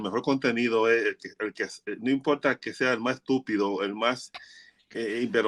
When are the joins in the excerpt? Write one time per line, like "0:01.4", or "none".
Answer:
none